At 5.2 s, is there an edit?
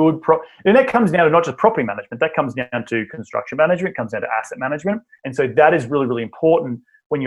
yes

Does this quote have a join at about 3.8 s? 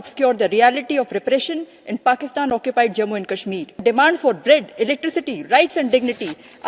yes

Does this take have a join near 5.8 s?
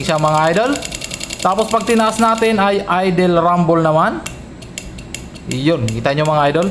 no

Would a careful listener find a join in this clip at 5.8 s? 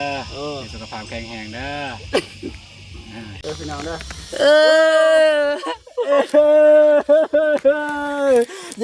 no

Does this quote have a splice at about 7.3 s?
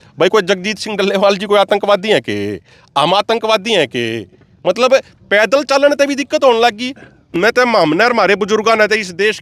yes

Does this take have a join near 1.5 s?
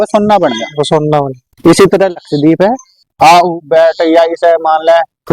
no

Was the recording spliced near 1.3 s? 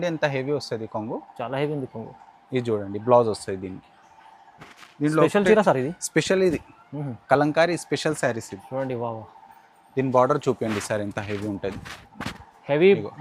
no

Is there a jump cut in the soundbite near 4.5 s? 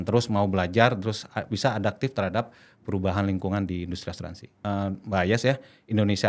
yes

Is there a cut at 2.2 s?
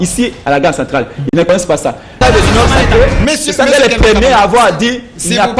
yes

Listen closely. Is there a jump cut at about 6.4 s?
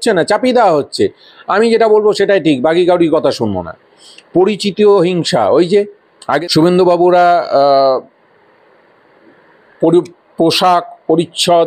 yes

